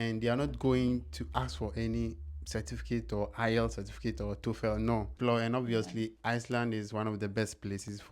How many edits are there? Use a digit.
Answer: 1